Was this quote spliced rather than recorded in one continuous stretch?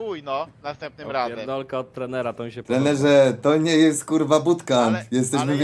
no; 0 cuts

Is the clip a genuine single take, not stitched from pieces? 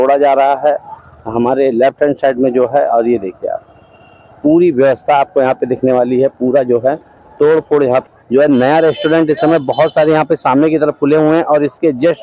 no; 1 cut; at 8.0 s

